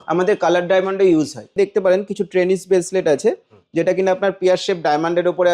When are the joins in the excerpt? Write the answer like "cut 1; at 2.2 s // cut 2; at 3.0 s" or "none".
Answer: cut 1; at 1.5 s